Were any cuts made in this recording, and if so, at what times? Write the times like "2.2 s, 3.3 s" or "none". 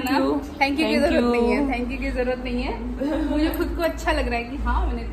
none